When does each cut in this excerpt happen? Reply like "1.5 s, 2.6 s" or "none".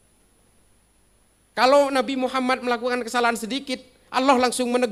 none